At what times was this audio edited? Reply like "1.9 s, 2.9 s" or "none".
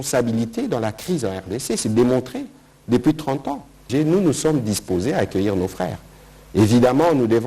3.8 s